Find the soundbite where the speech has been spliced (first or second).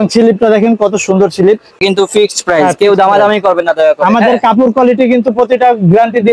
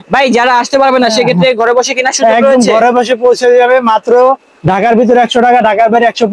first